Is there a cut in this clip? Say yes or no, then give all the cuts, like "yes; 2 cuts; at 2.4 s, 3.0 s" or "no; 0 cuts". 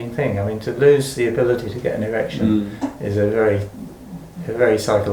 no; 0 cuts